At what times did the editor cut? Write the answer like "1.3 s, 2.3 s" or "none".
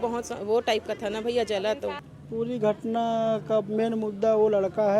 2.0 s